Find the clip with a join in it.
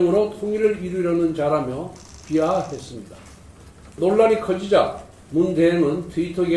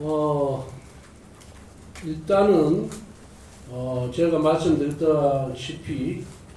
first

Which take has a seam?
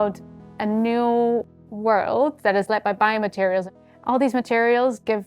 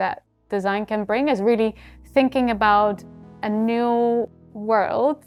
first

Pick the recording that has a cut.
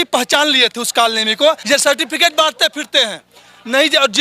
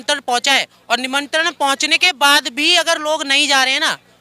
first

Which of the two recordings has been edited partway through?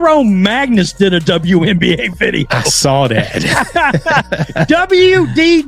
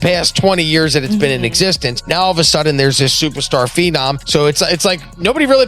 second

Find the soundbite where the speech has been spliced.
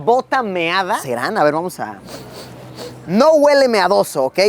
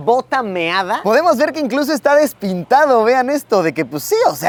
first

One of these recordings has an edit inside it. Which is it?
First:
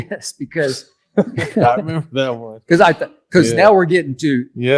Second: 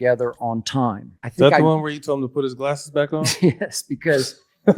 second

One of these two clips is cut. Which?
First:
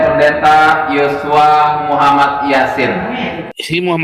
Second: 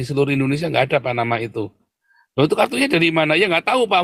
first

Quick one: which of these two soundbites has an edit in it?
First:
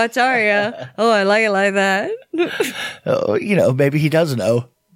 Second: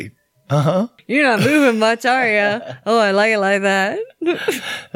second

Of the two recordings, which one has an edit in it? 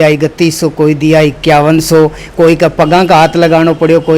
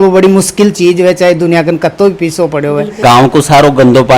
second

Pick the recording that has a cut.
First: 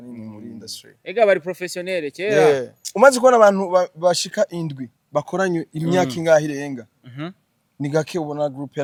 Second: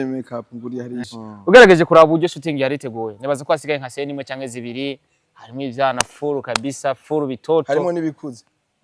second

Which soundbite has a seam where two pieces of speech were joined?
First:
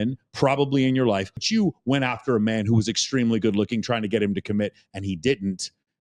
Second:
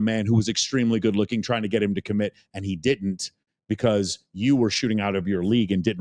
first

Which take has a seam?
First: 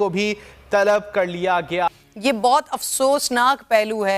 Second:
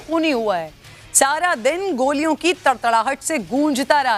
first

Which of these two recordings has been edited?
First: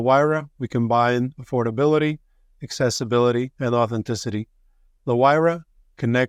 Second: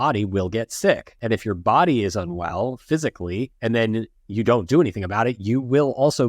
second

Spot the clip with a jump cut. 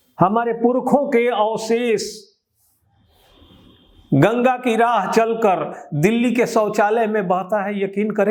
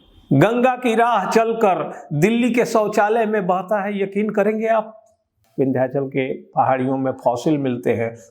second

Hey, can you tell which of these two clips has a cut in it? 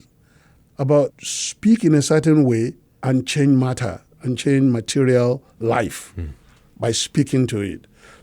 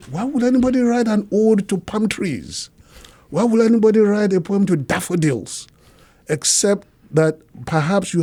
first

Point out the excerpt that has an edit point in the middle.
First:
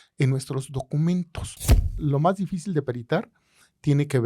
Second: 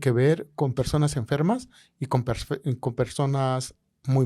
first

